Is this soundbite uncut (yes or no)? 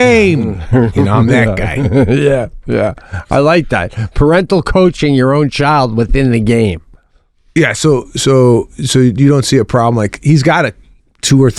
yes